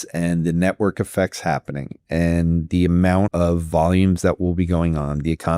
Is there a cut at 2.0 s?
no; 1 cut; at 3.3 s

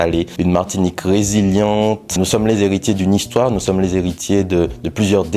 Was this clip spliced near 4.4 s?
no; 1 cut; at 2.1 s

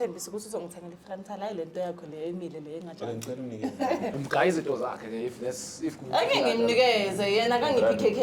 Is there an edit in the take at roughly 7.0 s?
no; 1 cut; at 4.2 s

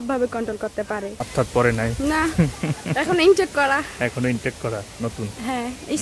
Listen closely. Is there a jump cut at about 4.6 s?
no; 1 cut; at 1.2 s

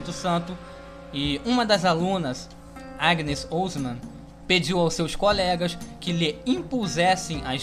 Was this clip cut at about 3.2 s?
yes; 1 cut; at 3.2 s

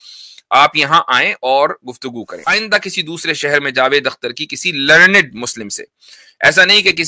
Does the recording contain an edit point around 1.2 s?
no; 1 cut; at 2.5 s

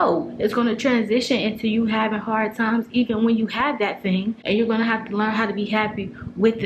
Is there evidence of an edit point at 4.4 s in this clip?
yes; 1 cut; at 4.4 s

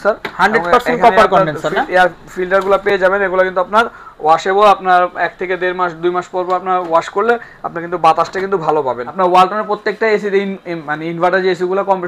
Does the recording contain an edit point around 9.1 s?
yes; 1 cut; at 9.1 s

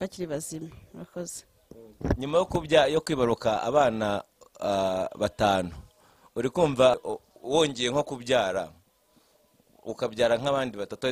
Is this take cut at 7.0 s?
yes; 1 cut; at 7.0 s

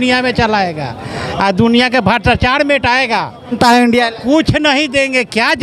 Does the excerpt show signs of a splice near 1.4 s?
no; 1 cut; at 3.5 s

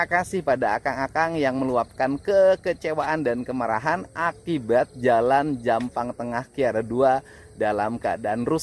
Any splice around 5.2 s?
no; 0 cuts

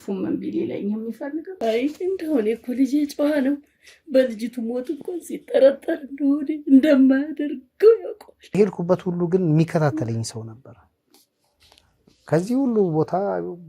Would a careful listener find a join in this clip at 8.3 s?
yes; 2 cuts; at 1.5 s, 8.3 s

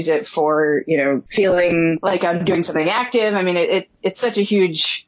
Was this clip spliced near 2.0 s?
yes; 2 cuts; at 1.3 s, 2.0 s

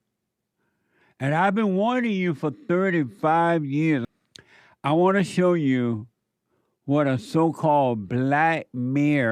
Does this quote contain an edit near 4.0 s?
yes; 1 cut; at 4.0 s

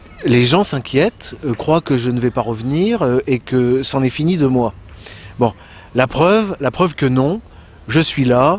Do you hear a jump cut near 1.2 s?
no; 1 cut; at 5.8 s

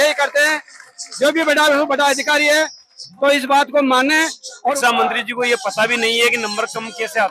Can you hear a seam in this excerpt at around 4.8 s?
yes; 1 cut; at 4.8 s

